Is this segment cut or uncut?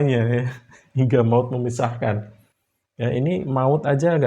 uncut